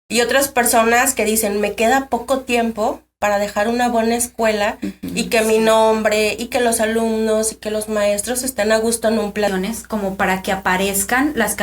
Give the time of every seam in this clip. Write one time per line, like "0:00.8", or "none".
0:09.5